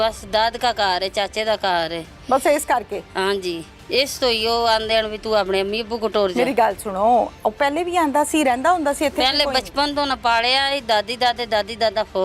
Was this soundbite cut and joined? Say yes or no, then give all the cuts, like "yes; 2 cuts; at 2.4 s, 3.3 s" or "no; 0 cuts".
no; 0 cuts